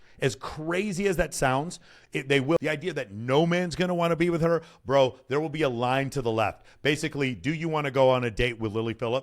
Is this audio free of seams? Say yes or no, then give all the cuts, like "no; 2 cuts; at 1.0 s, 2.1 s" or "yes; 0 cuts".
no; 1 cut; at 2.6 s